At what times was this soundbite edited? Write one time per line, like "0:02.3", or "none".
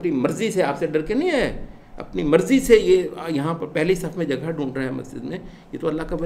none